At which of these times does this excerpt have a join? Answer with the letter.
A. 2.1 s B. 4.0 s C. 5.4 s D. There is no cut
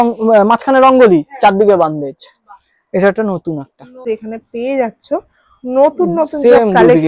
B